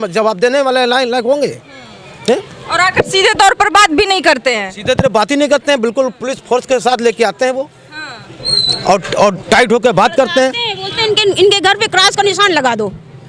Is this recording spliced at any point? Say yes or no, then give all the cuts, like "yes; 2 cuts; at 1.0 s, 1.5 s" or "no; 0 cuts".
no; 0 cuts